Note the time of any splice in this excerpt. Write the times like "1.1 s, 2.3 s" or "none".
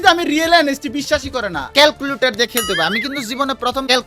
1.7 s